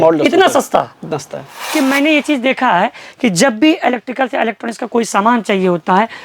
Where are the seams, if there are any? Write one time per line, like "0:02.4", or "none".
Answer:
0:01.7